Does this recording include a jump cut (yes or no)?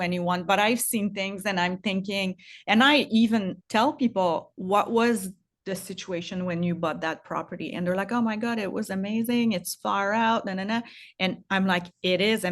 yes